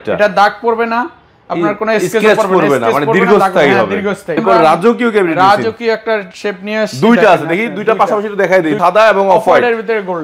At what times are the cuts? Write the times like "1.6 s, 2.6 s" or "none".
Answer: 4.4 s, 8.8 s